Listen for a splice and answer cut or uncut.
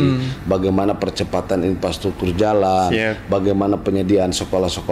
uncut